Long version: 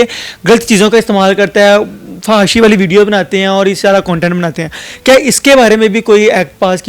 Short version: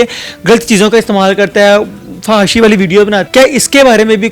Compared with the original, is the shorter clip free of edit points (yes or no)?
no